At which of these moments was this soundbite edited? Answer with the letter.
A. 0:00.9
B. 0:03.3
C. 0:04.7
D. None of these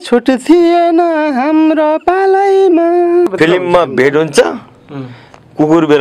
B